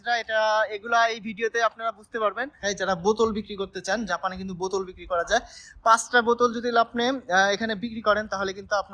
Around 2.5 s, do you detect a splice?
yes; 1 cut; at 2.5 s

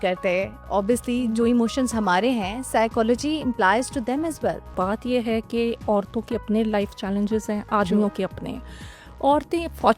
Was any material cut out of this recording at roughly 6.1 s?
no; 1 cut; at 4.7 s

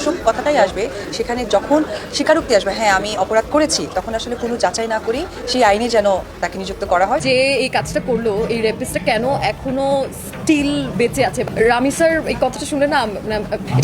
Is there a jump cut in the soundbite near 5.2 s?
no; 1 cut; at 7.2 s

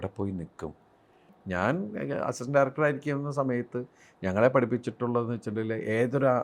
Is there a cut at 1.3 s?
yes; 1 cut; at 1.3 s

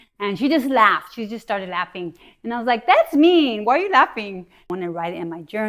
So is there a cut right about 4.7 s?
yes; 1 cut; at 4.7 s

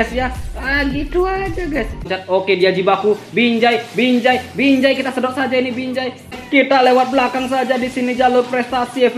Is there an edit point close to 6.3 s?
yes; 2 cuts; at 2.1 s, 6.3 s

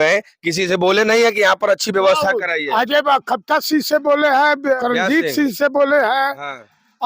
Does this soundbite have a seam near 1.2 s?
no; 1 cut; at 4.8 s

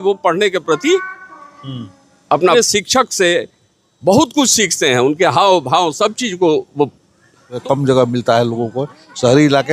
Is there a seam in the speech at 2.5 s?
yes; 2 cuts; at 2.5 s, 7.6 s

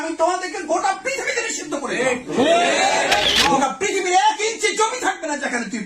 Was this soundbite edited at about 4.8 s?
no; 1 cut; at 3.6 s

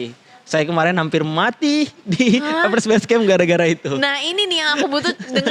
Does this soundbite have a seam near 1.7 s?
no; 0 cuts

